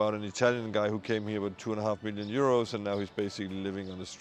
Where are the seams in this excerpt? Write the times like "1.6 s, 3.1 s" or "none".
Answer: none